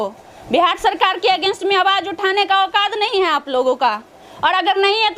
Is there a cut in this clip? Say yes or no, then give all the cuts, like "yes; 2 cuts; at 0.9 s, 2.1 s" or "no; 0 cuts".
no; 0 cuts